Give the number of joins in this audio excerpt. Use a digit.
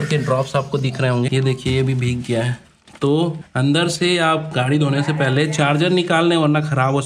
2